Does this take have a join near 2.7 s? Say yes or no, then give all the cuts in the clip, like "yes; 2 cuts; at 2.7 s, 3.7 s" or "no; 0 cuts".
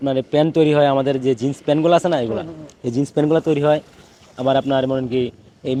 no; 0 cuts